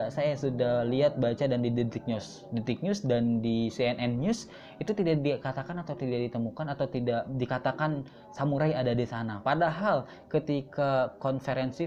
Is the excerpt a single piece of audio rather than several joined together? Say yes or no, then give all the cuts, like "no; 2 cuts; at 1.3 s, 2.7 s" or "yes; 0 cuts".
yes; 0 cuts